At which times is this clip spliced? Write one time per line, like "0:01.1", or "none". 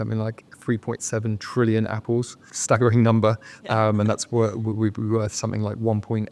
none

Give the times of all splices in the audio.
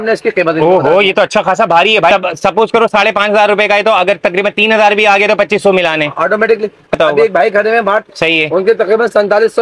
0:02.1
0:07.0
0:08.1

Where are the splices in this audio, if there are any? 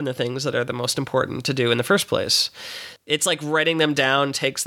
0:02.9

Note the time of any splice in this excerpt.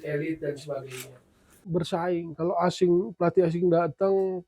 0:01.6

